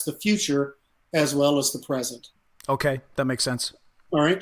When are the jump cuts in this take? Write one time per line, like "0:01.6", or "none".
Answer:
none

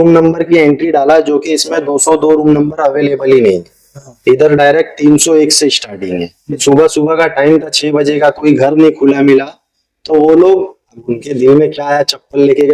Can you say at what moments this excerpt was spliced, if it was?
0:06.6

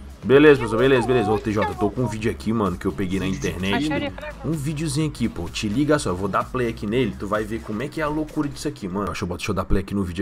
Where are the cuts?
0:09.1

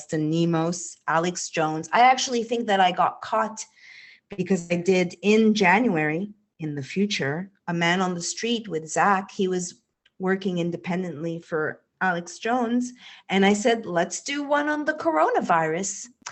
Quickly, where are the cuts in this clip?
none

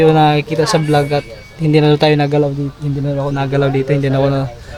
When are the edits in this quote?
none

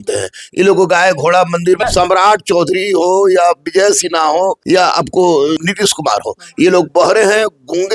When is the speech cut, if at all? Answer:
0:01.8
0:04.6
0:05.6

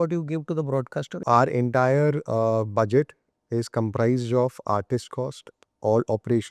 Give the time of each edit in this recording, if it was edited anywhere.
0:01.2

